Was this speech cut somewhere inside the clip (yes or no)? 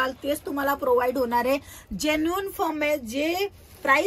no